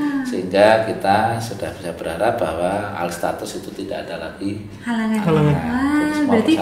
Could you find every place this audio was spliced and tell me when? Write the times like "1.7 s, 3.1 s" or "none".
none